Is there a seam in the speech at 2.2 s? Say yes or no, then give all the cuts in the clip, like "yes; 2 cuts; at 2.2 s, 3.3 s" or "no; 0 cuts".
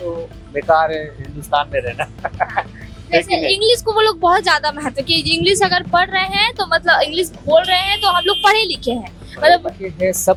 no; 0 cuts